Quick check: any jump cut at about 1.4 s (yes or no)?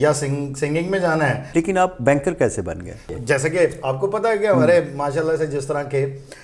yes